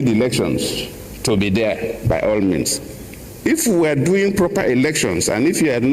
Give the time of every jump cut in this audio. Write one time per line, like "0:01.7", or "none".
none